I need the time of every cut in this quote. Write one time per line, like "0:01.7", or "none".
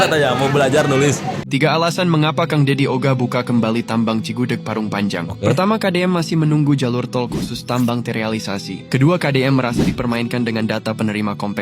0:01.4

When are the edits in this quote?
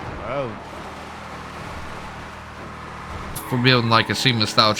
0:03.4

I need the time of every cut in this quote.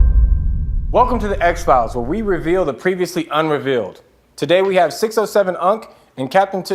0:03.1

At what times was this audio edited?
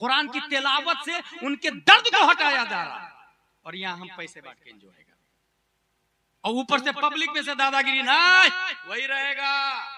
none

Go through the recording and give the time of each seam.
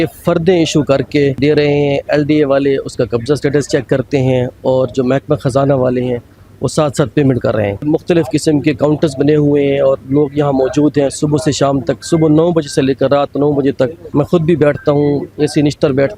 0:01.4
0:07.8
0:14.0

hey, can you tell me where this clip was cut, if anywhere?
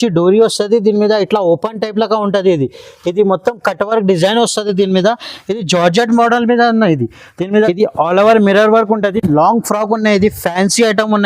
0:07.6

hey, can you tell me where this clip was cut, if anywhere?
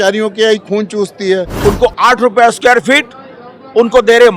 0:01.5

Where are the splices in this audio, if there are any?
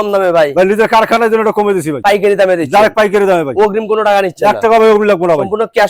none

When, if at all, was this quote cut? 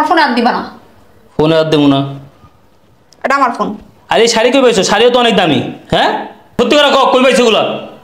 0:06.6

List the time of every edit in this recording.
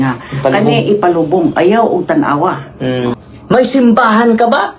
0:03.1

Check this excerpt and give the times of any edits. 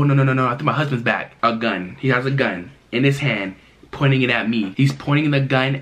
0:01.2

